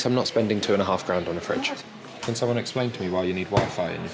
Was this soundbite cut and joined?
yes; 1 cut; at 1.9 s

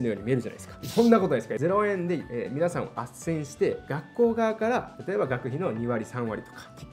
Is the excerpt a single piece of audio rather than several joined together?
yes; 0 cuts

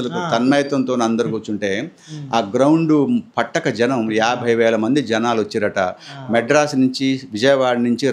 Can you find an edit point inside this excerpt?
no; 0 cuts

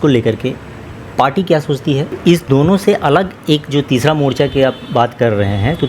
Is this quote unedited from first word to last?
no; 1 cut; at 2.2 s

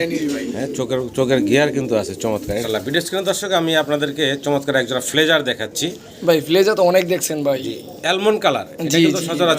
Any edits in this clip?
yes; 1 cut; at 2.6 s

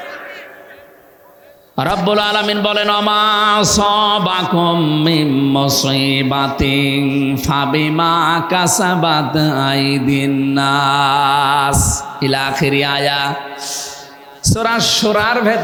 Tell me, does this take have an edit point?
no; 0 cuts

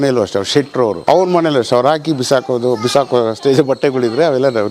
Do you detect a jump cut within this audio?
yes; 1 cut; at 1.0 s

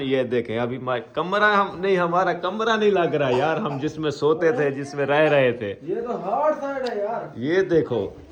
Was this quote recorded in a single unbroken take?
yes; 0 cuts

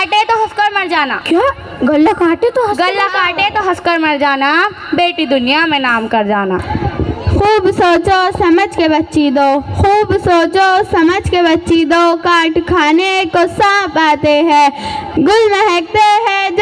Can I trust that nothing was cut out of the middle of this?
no; 1 cut; at 6.7 s

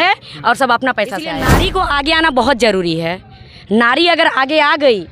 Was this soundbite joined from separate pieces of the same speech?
yes; 1 cut; at 1.5 s

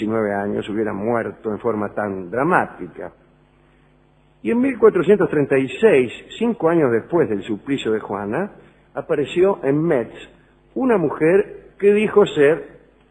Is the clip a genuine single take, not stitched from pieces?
yes; 0 cuts

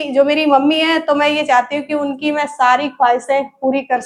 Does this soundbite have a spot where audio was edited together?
no; 0 cuts

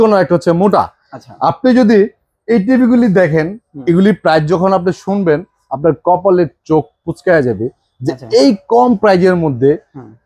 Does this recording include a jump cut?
no; 0 cuts

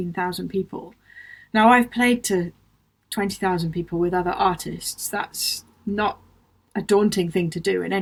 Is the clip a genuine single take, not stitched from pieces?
yes; 0 cuts

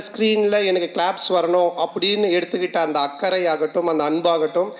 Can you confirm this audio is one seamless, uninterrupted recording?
yes; 0 cuts

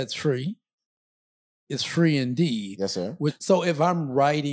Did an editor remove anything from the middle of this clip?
yes; 1 cut; at 3.4 s

